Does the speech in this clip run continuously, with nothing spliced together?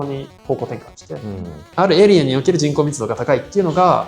no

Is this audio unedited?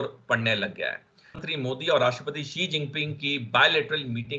no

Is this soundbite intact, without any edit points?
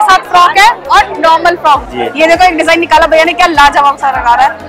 no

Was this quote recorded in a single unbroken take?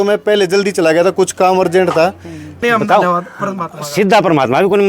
no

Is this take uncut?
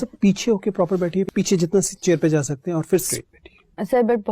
no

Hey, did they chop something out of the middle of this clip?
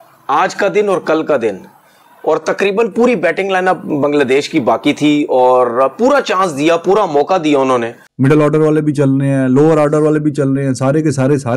yes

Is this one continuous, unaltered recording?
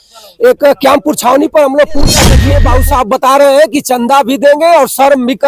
no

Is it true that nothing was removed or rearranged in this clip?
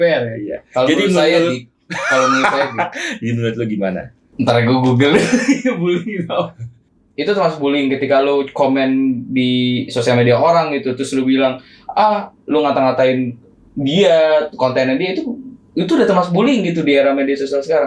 no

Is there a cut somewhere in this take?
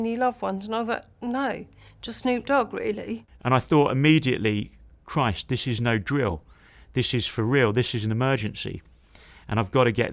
yes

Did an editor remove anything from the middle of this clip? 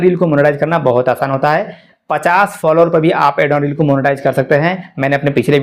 no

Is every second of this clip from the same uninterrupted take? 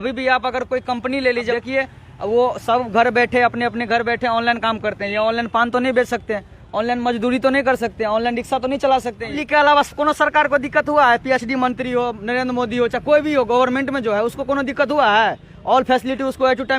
no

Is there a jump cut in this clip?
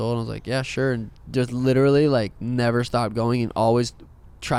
no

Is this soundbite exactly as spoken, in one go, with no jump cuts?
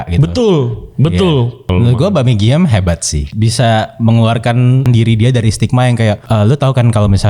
no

